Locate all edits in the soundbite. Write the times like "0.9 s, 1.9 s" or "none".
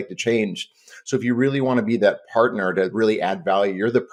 none